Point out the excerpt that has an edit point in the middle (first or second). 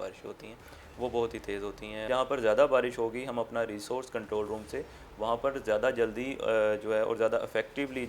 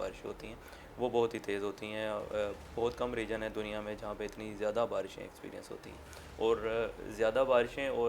first